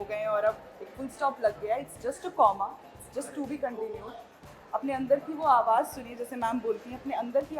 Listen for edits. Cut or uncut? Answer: uncut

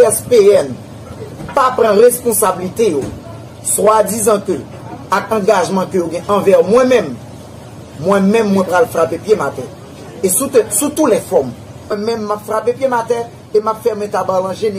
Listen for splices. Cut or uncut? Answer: cut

